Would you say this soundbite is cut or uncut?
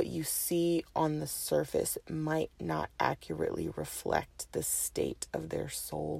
uncut